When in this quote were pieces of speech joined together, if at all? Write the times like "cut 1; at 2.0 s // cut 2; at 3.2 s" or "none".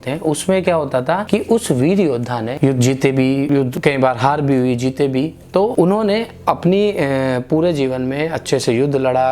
cut 1; at 1.2 s // cut 2; at 2.5 s // cut 3; at 3.5 s // cut 4; at 5.7 s